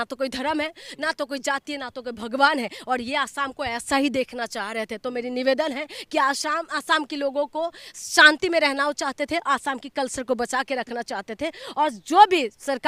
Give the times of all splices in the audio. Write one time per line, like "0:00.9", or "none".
none